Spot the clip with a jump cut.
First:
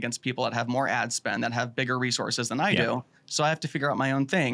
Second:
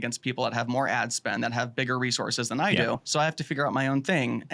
second; 1 cut; at 3.0 s

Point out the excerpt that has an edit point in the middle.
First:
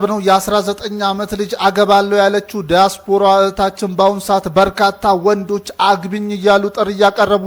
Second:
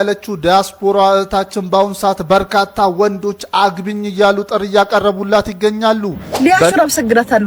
second; 1 cut; at 6.2 s

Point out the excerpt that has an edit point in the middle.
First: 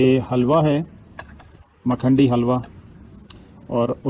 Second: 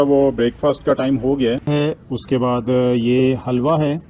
second; 1 cut; at 1.7 s

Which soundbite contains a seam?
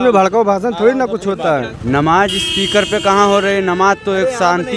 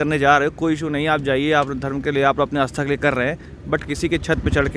first; 1 cut; at 1.7 s

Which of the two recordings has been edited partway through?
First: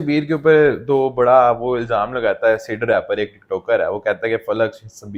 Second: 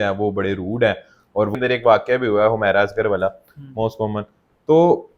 second; 1 cut; at 1.6 s

